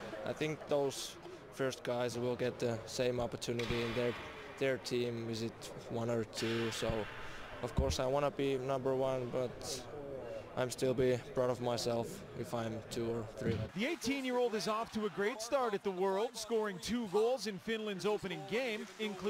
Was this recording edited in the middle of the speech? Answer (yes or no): yes